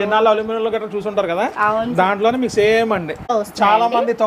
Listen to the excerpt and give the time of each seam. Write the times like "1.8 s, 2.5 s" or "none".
3.3 s